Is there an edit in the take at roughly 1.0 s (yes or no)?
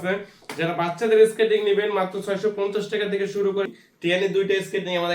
no